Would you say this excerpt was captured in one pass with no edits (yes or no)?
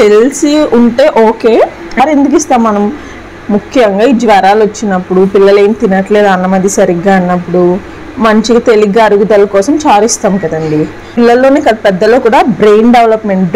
no